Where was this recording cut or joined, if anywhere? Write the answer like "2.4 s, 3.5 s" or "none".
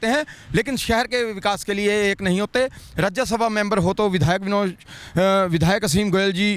none